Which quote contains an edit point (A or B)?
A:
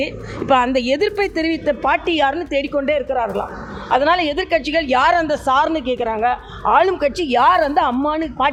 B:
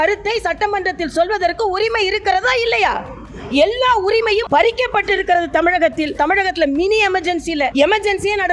B